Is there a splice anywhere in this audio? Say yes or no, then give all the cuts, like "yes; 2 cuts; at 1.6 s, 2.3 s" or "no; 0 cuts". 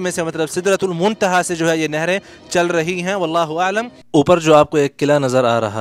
yes; 1 cut; at 4.0 s